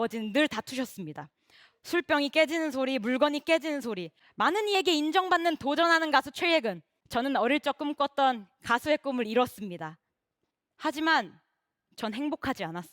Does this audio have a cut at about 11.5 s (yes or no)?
no